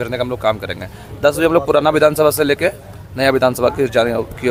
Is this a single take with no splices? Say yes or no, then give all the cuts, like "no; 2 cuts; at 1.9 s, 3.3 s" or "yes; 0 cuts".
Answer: yes; 0 cuts